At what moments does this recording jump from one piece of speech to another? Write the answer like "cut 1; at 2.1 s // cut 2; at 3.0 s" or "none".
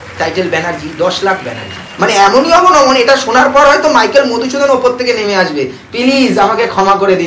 cut 1; at 1.9 s